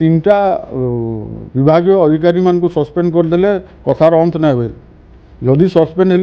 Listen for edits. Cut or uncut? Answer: uncut